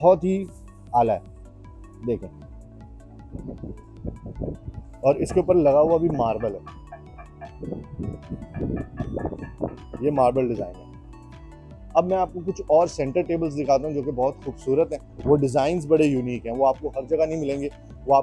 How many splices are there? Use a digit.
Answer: 0